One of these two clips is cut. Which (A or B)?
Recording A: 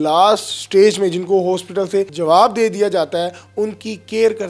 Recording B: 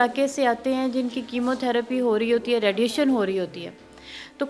A